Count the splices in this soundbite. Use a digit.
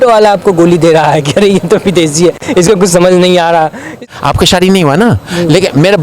1